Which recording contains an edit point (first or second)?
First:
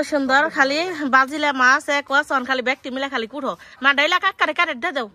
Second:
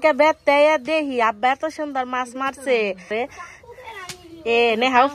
second